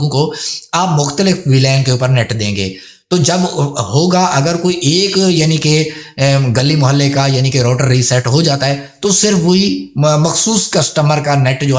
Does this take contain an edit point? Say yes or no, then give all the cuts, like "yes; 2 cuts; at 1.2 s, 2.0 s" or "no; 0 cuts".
no; 0 cuts